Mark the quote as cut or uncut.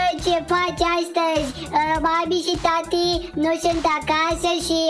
uncut